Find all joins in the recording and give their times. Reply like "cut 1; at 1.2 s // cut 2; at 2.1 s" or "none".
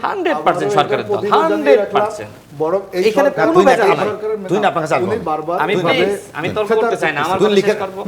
none